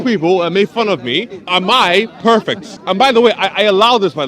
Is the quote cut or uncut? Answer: cut